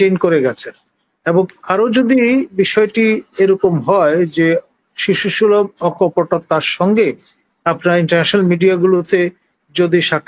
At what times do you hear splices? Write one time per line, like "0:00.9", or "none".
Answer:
none